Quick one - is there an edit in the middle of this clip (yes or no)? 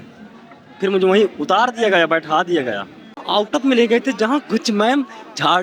yes